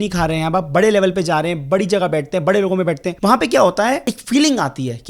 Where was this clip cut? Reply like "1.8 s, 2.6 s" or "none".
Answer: 3.1 s, 4.1 s